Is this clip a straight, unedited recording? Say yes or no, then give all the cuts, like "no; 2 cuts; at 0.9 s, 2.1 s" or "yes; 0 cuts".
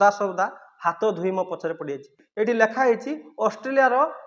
no; 1 cut; at 2.2 s